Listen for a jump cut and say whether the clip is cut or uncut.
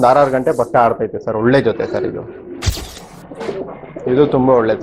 cut